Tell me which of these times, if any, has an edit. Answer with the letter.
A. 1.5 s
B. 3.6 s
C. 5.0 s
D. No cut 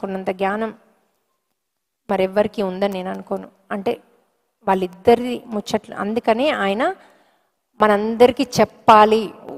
D